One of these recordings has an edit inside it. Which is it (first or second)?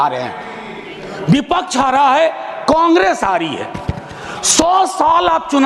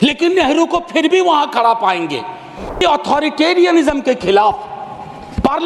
second